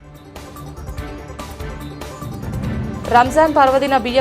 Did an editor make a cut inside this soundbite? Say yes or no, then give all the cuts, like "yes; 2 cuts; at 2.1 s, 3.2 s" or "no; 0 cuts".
yes; 2 cuts; at 1.4 s, 2.6 s